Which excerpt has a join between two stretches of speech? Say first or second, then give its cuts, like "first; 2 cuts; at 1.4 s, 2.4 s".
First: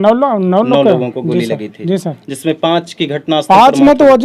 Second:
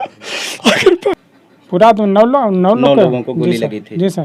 second; 1 cut; at 1.1 s